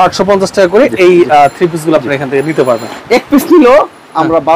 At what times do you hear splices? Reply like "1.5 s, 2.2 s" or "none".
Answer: 2.9 s